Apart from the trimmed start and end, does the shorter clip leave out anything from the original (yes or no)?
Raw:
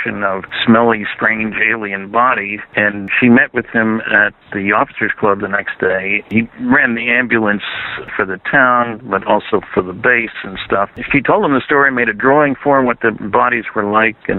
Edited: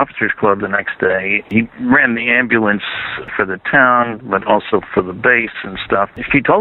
no